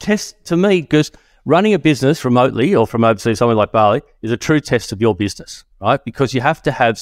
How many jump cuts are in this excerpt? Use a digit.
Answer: 1